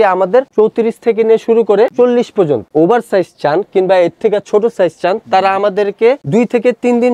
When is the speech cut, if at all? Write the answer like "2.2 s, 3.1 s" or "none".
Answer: 2.7 s